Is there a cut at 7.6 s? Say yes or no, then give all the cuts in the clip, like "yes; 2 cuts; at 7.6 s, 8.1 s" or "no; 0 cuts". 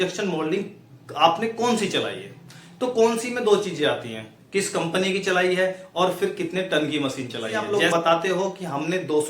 yes; 1 cut; at 7.6 s